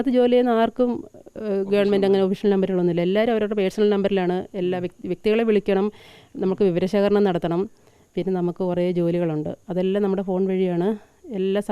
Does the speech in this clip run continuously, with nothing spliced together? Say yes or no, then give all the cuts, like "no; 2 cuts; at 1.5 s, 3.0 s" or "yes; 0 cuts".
yes; 0 cuts